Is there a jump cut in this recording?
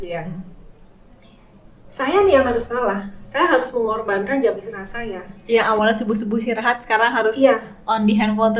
no; 0 cuts

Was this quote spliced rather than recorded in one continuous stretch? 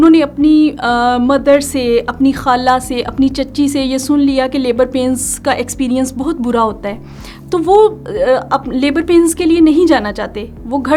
no; 0 cuts

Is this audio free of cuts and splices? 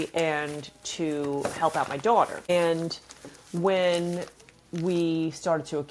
no; 1 cut; at 2.5 s

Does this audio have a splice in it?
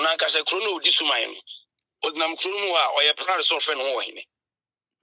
no; 0 cuts

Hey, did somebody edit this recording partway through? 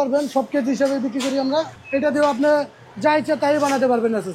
yes; 1 cut; at 1.8 s

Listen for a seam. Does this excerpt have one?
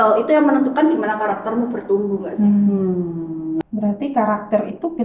yes; 1 cut; at 3.6 s

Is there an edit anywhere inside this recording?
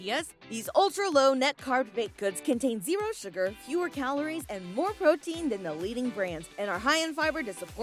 no; 0 cuts

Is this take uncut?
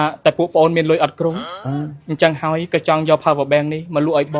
yes; 0 cuts

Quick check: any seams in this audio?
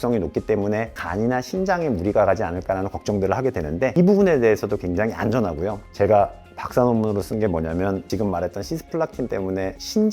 yes; 3 cuts; at 1.0 s, 3.9 s, 8.0 s

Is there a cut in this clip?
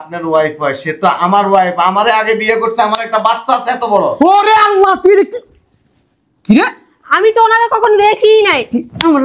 no; 0 cuts

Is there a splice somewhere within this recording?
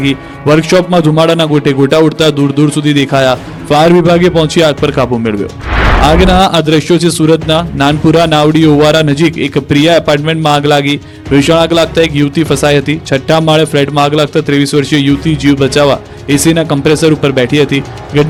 no; 0 cuts

